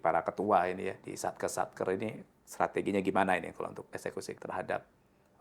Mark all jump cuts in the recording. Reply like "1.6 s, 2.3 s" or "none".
1.1 s, 3.8 s